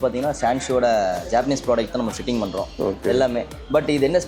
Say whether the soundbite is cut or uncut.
uncut